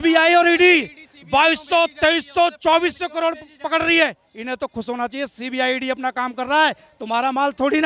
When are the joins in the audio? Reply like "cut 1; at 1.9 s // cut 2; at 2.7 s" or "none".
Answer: none